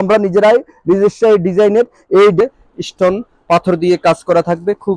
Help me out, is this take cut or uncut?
cut